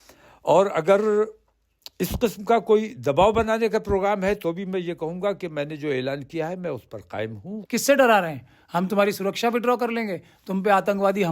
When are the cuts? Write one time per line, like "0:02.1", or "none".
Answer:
0:07.5